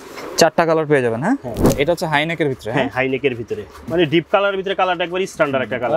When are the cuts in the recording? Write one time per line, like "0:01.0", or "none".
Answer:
0:01.6
0:03.9

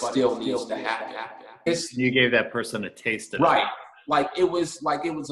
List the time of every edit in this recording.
0:01.7

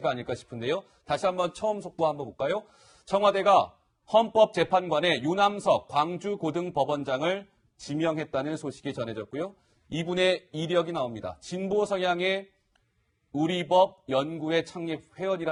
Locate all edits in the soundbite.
none

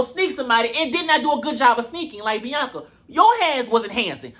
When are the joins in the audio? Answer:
none

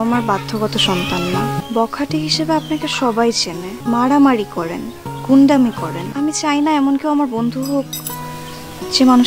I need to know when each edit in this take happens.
0:01.6
0:03.7
0:06.0

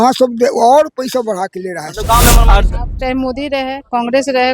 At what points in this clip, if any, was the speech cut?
0:02.4

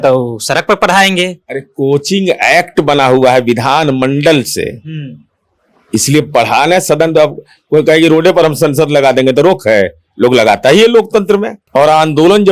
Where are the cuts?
0:11.6

